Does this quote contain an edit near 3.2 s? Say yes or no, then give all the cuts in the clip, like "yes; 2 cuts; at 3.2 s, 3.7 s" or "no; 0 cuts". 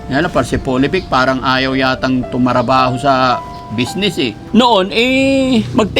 no; 1 cut; at 4.4 s